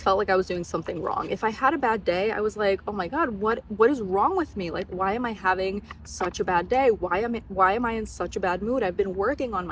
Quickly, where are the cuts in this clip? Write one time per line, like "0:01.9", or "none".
none